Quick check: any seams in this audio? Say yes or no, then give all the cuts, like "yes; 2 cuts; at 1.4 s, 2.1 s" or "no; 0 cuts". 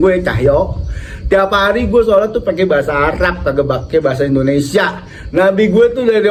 no; 0 cuts